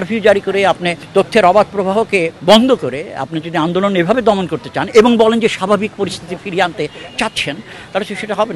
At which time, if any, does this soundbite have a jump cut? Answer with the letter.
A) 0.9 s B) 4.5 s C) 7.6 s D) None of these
A